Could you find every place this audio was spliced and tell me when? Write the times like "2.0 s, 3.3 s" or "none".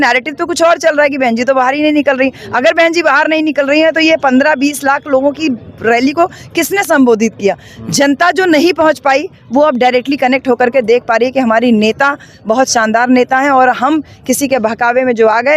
none